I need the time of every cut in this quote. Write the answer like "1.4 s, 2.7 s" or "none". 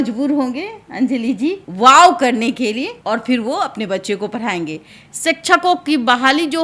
1.7 s, 2.9 s, 5.0 s